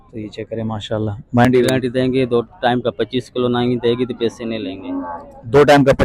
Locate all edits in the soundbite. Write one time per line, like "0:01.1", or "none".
0:01.5